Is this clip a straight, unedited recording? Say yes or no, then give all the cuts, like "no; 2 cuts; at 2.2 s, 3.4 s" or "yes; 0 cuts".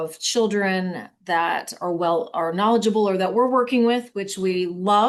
yes; 0 cuts